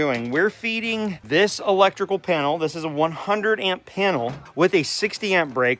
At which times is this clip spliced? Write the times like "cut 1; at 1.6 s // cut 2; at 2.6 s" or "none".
cut 1; at 1.2 s // cut 2; at 4.5 s